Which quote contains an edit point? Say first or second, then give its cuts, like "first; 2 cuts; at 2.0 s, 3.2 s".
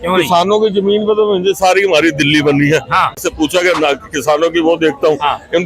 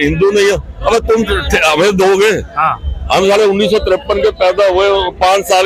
first; 1 cut; at 3.3 s